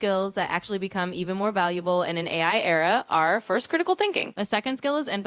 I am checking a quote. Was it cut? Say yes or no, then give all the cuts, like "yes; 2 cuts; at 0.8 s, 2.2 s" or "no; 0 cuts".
yes; 1 cut; at 4.3 s